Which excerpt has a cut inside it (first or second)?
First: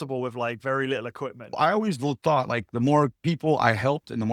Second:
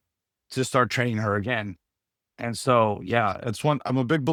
first